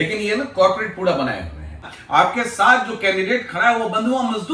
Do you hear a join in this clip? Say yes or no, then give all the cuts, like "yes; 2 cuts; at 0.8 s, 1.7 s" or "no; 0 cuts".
yes; 1 cut; at 1.9 s